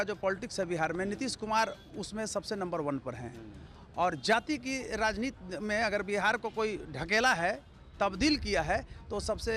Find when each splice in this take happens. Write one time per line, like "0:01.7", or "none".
none